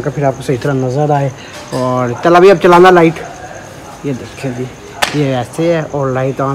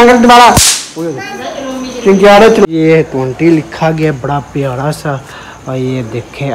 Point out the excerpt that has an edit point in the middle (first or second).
second